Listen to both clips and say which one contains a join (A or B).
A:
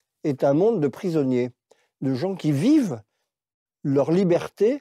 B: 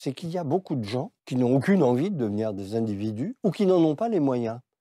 B